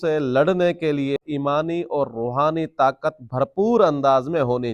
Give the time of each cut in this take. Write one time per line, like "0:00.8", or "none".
0:01.2